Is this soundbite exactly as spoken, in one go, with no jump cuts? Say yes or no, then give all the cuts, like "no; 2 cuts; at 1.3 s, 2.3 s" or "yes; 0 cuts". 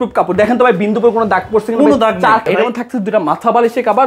no; 1 cut; at 2.5 s